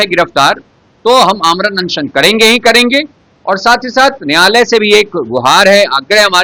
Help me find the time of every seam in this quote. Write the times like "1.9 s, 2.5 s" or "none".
none